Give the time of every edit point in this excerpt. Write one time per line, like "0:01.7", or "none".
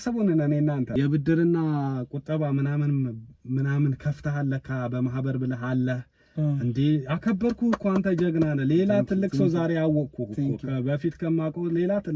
0:00.9